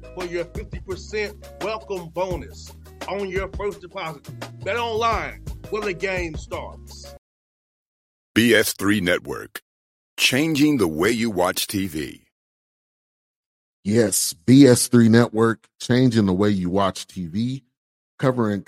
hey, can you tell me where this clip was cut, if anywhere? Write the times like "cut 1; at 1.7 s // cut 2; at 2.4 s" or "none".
cut 1; at 7.1 s